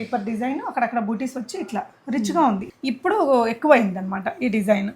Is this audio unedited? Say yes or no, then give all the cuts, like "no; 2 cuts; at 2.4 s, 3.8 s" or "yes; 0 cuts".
no; 1 cut; at 2.7 s